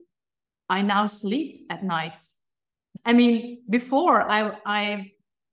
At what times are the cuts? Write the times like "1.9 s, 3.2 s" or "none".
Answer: 2.8 s